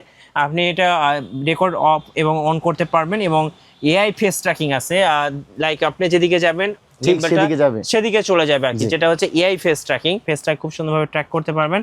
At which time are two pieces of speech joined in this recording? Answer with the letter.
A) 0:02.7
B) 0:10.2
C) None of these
B